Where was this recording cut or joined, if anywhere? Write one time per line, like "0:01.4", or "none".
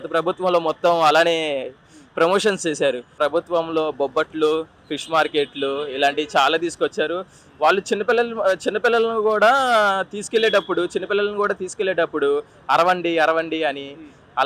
0:03.2